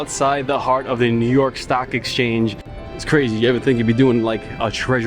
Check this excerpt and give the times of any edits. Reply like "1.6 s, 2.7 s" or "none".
2.7 s